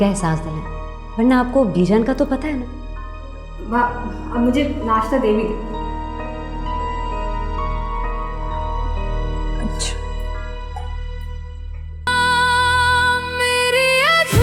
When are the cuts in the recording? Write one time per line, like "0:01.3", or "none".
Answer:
none